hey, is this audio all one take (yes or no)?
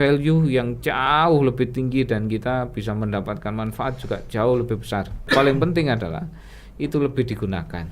no